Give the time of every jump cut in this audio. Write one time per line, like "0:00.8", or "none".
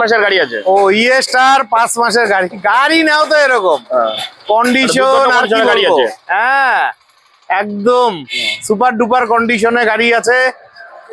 none